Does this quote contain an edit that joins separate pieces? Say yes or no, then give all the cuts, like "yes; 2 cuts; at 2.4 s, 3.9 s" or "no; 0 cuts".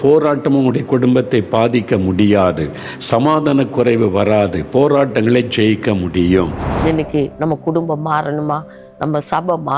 yes; 1 cut; at 6.7 s